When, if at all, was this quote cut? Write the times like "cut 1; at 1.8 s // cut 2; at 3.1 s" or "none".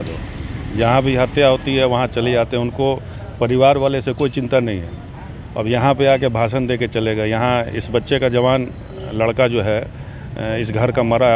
none